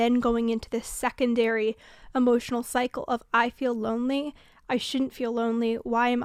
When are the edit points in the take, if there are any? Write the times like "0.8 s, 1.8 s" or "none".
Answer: none